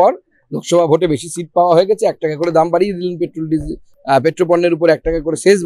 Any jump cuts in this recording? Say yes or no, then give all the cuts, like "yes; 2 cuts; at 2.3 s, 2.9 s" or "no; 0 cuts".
no; 0 cuts